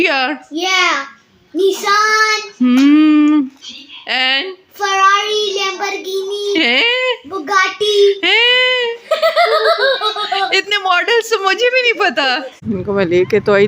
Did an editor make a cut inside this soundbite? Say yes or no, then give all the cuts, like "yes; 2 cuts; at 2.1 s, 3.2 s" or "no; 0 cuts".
yes; 1 cut; at 12.6 s